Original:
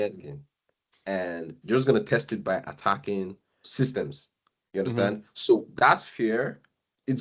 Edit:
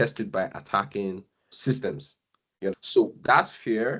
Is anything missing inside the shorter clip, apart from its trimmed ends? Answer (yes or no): yes